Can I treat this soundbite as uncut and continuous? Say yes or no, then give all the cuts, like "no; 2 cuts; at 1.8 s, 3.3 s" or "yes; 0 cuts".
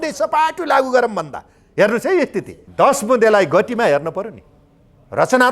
no; 1 cut; at 2.6 s